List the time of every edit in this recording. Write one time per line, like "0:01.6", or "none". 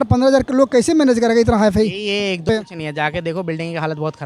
0:02.5